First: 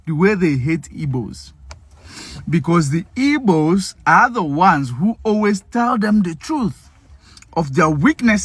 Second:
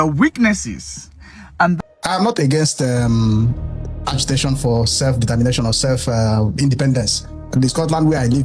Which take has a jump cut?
second; 1 cut; at 1.8 s

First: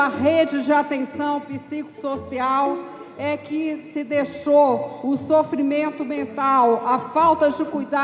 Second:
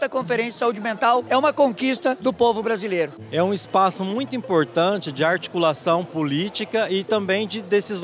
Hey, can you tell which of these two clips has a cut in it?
second; 3 cuts; at 1.2 s, 2.2 s, 3.2 s

